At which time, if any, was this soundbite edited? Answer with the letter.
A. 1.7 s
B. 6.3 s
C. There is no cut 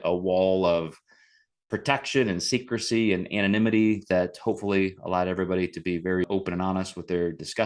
B